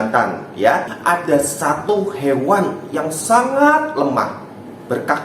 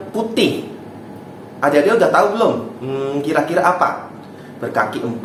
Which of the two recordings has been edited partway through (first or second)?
first